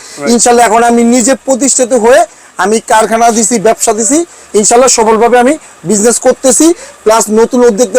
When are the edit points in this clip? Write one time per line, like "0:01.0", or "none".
none

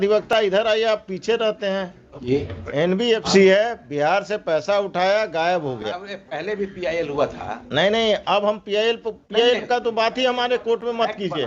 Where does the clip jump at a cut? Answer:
0:02.3

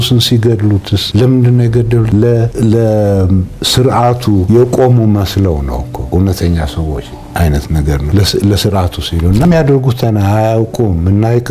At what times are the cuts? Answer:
0:01.0
0:02.5
0:04.4
0:05.9
0:08.1
0:09.4

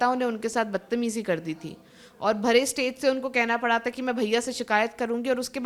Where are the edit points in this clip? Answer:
none

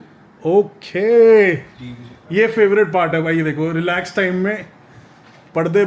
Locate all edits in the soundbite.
none

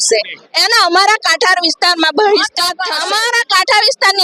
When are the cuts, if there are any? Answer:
0:02.9

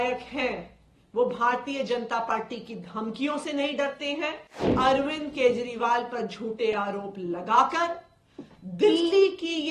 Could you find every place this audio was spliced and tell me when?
0:04.7

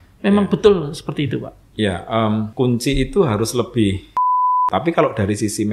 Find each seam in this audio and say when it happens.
0:02.5
0:04.6

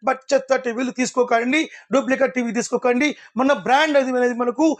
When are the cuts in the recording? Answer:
none

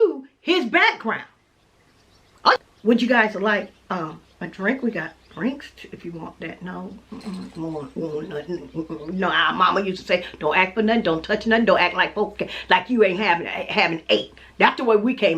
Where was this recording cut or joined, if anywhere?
0:02.6

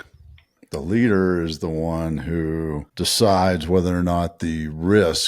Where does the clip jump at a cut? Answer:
0:02.9

